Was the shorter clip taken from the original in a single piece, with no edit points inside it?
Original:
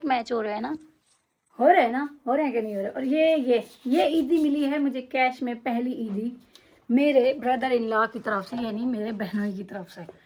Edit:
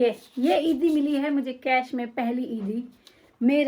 yes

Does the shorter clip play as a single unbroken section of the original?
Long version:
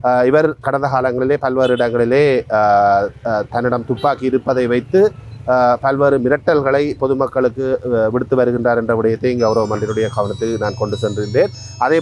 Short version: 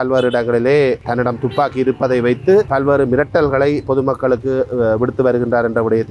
no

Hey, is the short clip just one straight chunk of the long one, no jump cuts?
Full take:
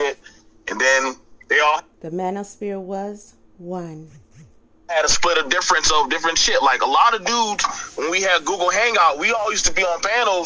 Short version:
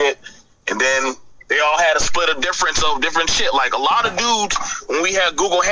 no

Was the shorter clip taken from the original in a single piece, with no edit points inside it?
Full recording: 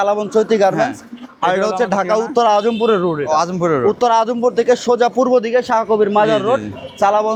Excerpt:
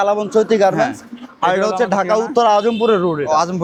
yes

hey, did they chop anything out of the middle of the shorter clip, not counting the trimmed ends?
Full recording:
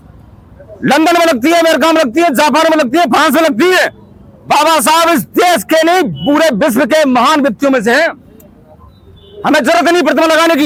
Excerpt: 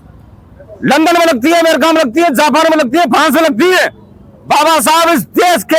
no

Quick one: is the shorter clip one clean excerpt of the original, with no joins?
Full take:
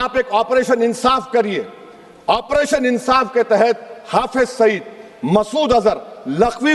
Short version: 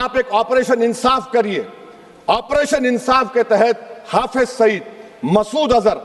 yes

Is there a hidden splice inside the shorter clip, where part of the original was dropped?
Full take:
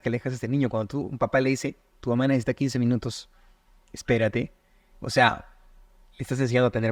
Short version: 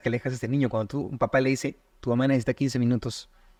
no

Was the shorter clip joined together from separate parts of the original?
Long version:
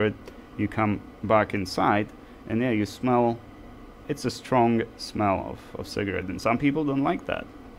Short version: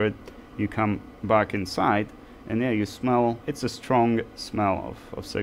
yes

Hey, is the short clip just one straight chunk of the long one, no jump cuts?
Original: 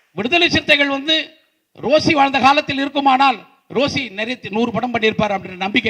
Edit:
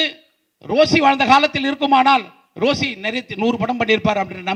yes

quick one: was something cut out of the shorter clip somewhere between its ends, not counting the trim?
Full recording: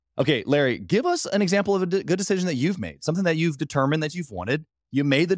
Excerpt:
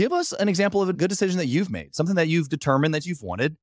yes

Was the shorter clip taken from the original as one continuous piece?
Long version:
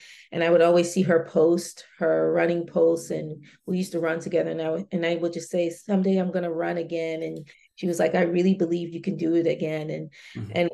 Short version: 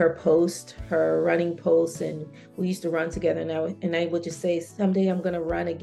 yes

